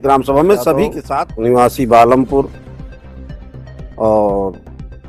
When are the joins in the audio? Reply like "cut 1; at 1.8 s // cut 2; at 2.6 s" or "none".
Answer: cut 1; at 1.0 s // cut 2; at 2.6 s // cut 3; at 3.9 s